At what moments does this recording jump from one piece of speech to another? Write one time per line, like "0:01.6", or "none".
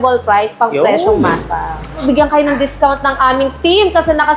0:02.0